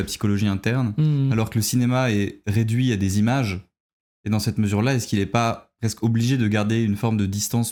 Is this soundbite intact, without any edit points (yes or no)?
yes